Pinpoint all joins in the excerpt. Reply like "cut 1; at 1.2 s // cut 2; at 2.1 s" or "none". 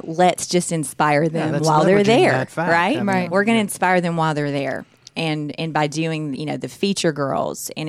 none